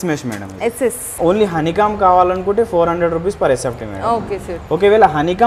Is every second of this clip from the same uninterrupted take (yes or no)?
no